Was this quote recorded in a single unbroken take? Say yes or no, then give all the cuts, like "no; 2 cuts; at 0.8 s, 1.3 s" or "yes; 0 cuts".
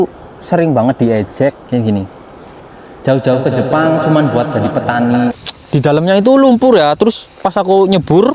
no; 2 cuts; at 1.6 s, 5.4 s